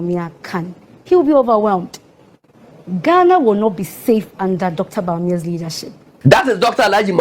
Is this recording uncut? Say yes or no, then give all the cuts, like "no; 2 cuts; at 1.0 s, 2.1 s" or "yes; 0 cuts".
no; 1 cut; at 6.1 s